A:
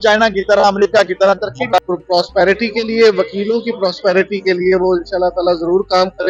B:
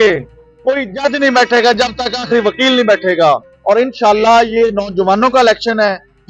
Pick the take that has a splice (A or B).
A